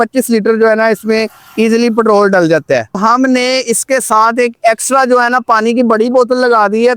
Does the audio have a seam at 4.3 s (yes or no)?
no